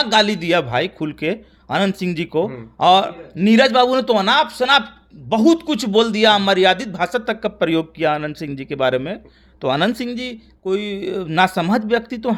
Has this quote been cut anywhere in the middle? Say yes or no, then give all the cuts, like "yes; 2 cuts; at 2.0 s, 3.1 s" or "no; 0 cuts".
no; 0 cuts